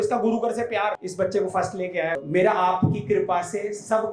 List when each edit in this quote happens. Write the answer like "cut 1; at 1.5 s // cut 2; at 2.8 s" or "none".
cut 1; at 1.0 s // cut 2; at 2.2 s